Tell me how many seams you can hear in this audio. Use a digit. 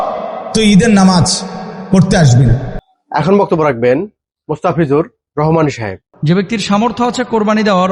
0